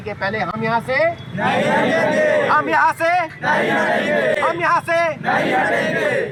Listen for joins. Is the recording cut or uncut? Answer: uncut